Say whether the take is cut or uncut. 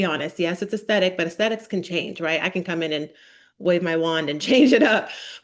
uncut